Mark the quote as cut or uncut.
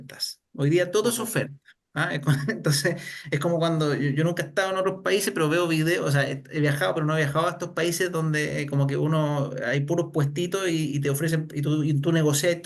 uncut